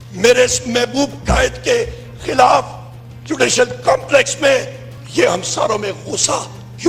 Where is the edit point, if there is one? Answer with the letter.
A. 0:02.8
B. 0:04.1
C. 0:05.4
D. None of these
D